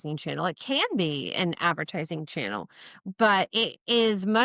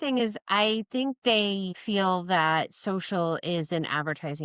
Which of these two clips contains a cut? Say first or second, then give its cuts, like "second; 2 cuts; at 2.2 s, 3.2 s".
second; 1 cut; at 1.7 s